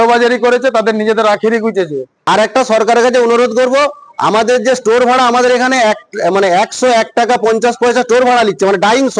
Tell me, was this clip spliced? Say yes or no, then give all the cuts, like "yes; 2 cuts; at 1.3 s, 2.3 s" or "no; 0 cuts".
yes; 1 cut; at 2.1 s